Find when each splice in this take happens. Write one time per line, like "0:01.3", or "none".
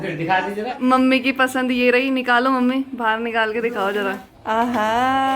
0:00.8
0:04.3